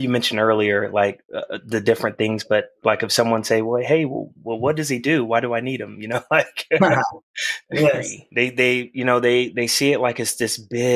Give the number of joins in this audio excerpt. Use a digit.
1